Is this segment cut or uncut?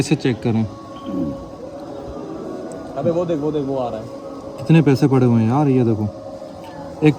uncut